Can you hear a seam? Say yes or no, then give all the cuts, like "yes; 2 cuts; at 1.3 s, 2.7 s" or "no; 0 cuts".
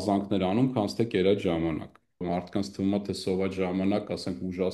yes; 1 cut; at 2.2 s